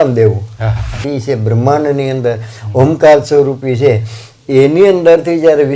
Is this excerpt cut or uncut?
cut